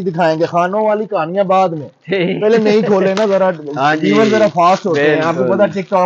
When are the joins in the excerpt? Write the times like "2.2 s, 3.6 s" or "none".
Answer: none